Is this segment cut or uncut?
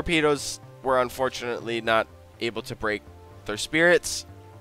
uncut